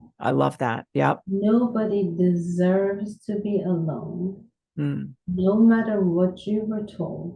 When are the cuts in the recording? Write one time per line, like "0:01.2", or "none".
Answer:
0:01.2